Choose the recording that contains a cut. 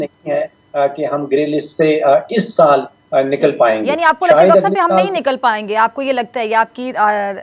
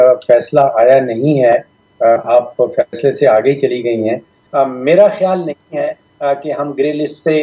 second; 1 cut; at 4.4 s

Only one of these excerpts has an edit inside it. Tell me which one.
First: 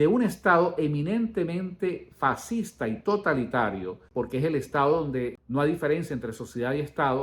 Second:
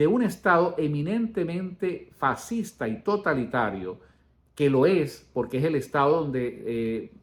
first; 2 cuts; at 4.0 s, 5.4 s

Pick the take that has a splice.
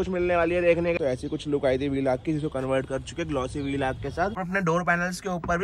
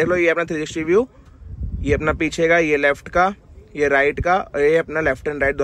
first; 2 cuts; at 0.9 s, 4.5 s

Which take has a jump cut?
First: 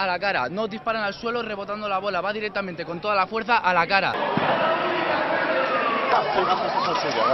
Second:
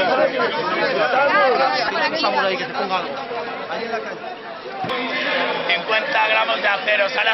first; 1 cut; at 4.1 s

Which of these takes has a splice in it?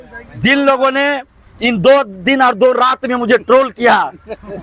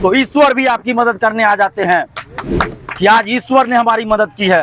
second; 1 cut; at 2.3 s

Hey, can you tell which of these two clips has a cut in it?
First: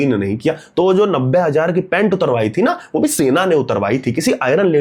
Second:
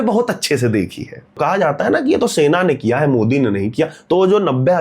second; 1 cut; at 1.4 s

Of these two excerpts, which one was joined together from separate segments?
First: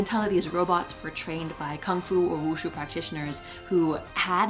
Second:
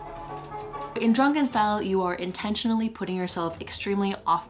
second; 1 cut; at 1.0 s

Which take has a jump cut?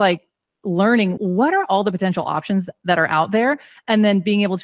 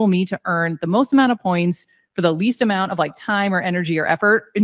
first; 1 cut; at 1.1 s

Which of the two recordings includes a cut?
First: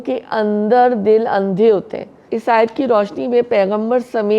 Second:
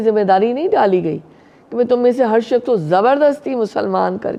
first; 1 cut; at 2.3 s

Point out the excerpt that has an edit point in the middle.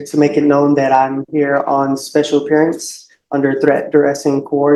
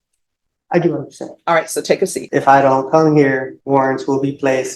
second; 2 cuts; at 2.2 s, 3.5 s

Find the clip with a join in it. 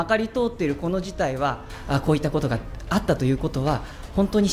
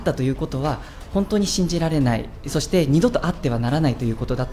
first; 1 cut; at 1.7 s

